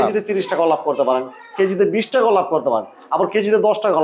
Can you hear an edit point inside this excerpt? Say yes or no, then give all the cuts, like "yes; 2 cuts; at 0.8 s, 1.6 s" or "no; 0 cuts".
no; 0 cuts